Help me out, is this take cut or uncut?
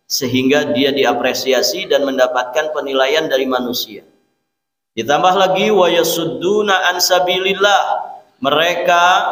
uncut